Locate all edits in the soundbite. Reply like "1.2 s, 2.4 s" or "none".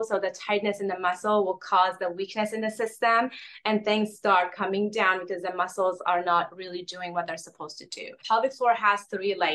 8.2 s